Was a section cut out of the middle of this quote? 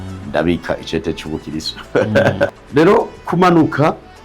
yes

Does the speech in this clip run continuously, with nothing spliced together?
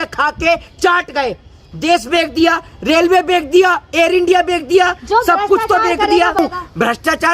no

